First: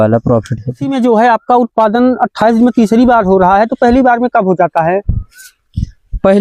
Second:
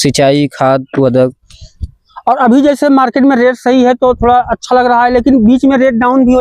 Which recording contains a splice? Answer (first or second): first